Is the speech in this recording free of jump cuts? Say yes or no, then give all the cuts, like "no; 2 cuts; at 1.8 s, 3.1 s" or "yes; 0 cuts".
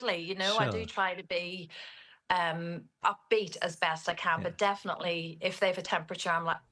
yes; 0 cuts